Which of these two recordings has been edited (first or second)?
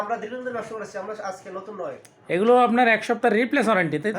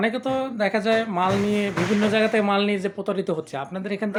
first